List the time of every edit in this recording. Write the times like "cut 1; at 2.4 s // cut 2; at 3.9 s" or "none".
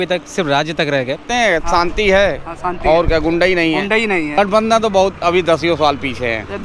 cut 1; at 1.3 s // cut 2; at 4.4 s